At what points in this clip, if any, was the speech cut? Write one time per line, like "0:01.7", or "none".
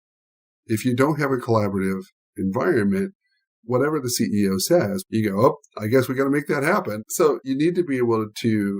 0:05.0
0:07.4

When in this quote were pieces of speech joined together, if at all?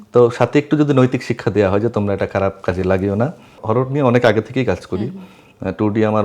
0:03.6

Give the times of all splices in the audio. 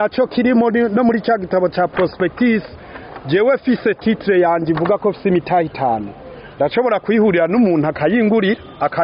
none

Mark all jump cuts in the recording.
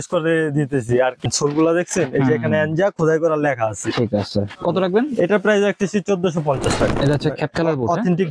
0:01.2
0:04.5
0:06.9

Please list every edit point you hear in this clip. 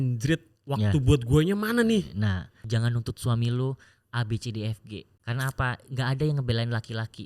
0:02.6
0:05.1

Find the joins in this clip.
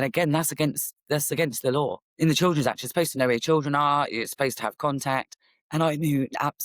0:02.0

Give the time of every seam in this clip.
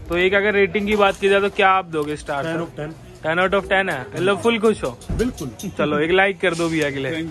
none

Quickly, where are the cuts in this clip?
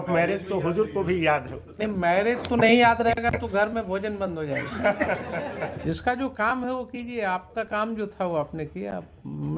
0:05.8

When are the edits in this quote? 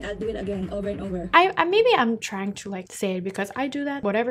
0:01.3

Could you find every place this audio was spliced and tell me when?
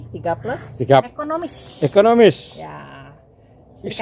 0:01.1

